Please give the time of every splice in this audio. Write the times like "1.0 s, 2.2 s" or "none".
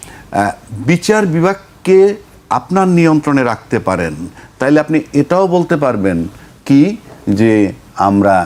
none